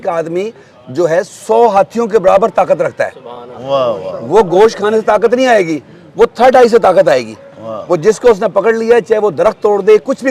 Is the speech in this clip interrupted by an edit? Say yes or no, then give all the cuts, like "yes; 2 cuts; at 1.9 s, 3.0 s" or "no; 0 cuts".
no; 0 cuts